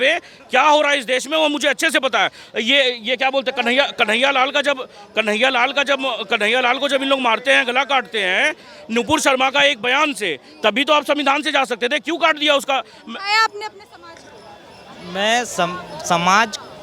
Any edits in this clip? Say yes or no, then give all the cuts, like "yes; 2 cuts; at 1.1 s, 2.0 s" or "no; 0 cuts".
no; 0 cuts